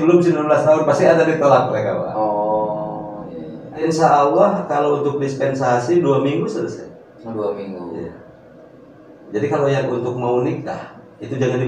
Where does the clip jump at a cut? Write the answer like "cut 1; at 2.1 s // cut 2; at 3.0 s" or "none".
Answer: cut 1; at 3.8 s